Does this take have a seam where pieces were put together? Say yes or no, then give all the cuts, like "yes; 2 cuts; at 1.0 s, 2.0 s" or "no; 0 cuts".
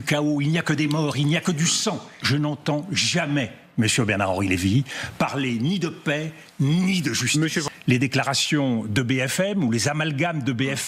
yes; 2 cuts; at 2.1 s, 7.6 s